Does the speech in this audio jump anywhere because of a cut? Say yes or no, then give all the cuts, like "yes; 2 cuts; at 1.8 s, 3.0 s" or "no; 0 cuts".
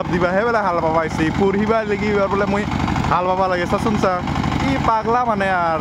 no; 0 cuts